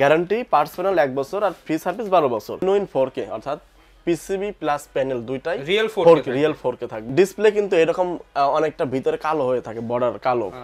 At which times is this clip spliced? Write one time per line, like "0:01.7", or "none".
0:02.6
0:06.9